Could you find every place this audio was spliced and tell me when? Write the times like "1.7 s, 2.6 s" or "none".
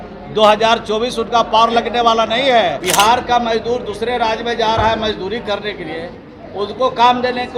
2.8 s